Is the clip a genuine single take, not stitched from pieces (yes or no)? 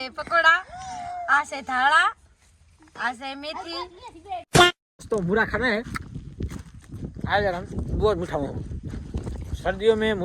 no